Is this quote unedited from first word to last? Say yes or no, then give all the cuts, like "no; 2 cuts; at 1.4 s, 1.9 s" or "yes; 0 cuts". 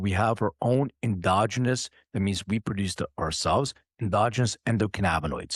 yes; 0 cuts